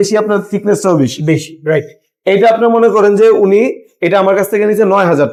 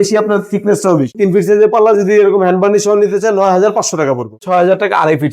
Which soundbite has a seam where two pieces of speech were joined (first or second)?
second